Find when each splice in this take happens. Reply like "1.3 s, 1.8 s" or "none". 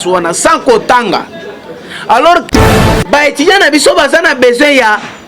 2.5 s